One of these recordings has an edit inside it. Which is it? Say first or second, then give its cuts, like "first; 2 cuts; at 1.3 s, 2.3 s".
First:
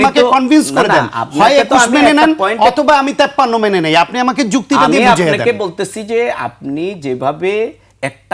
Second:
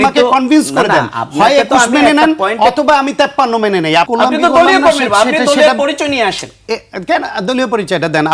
second; 1 cut; at 4.1 s